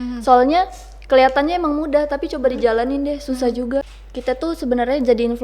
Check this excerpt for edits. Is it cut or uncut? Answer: cut